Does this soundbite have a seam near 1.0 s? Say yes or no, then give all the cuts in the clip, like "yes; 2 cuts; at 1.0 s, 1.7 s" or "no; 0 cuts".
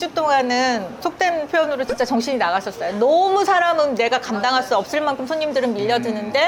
yes; 1 cut; at 1.0 s